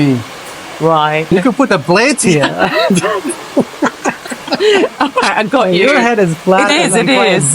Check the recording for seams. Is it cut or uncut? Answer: cut